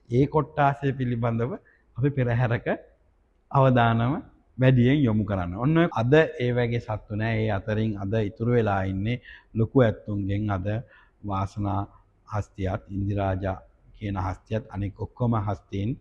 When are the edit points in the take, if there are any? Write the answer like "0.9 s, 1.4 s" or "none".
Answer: 5.9 s